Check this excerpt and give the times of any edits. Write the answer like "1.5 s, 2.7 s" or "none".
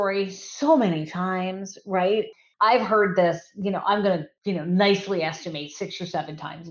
2.4 s